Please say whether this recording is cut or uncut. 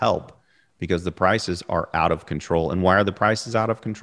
uncut